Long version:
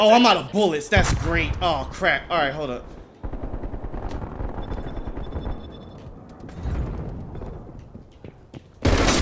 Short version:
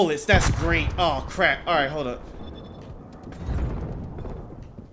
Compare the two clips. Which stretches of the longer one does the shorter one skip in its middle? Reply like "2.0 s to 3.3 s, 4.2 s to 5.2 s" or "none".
3.1 s to 5.6 s